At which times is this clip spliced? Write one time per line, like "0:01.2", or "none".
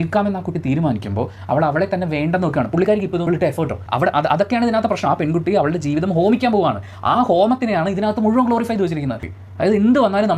0:03.3
0:09.3